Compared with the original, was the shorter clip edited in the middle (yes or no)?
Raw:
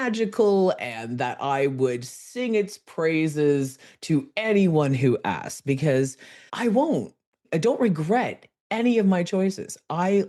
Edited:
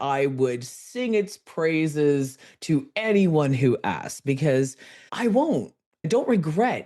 yes